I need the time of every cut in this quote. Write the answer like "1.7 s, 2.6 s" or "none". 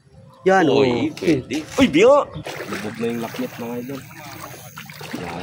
2.4 s

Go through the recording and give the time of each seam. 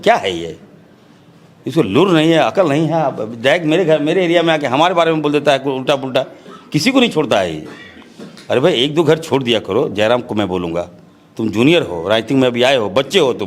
none

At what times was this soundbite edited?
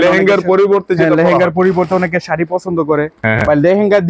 3.2 s

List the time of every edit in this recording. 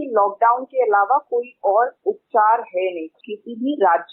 2.0 s, 3.1 s

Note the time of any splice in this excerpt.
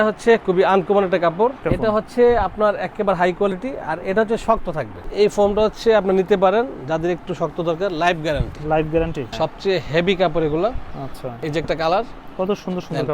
1.6 s, 5.0 s, 9.3 s, 11.4 s

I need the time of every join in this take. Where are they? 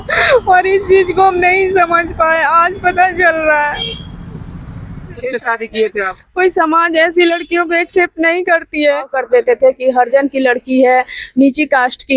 5.2 s, 9.1 s

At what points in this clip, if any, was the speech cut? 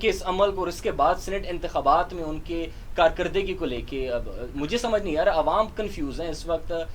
none

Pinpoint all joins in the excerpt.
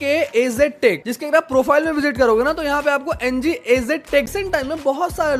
4.3 s

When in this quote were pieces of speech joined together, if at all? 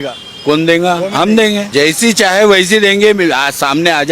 1.6 s

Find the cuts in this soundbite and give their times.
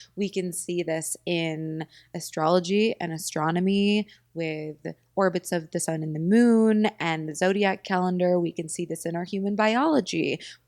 none

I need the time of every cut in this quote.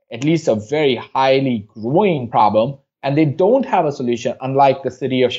2.4 s

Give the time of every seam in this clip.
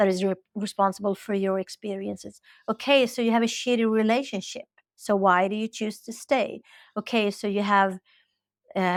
none

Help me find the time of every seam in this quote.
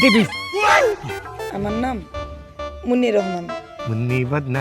1.3 s

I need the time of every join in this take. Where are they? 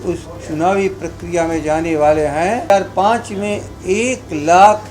2.7 s

